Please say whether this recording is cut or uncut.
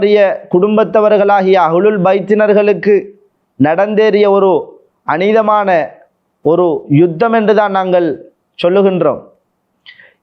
uncut